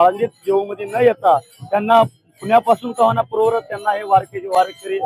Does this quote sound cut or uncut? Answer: uncut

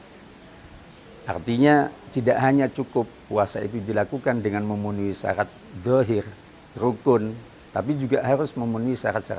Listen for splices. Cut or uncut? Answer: uncut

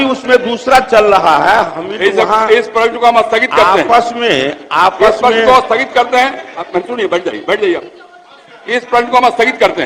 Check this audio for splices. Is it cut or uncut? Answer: uncut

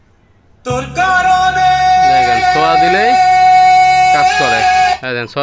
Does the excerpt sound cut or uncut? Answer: uncut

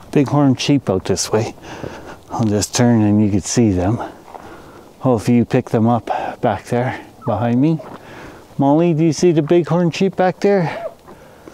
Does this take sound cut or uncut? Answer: uncut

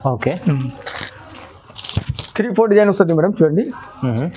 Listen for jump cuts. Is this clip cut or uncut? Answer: cut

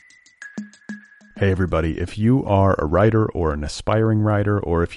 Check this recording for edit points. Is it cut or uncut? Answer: cut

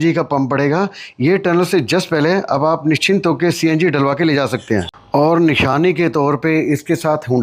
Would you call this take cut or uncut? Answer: uncut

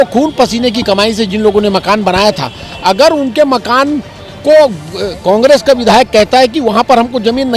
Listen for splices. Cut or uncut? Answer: uncut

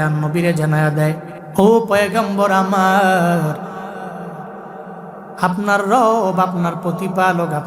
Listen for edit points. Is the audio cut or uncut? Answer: cut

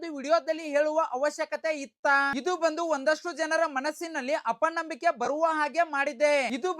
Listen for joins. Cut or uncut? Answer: uncut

